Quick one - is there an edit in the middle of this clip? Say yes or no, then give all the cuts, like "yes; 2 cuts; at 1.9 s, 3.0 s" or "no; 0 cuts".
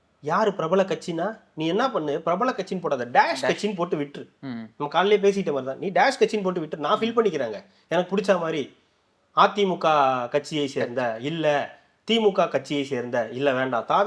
no; 0 cuts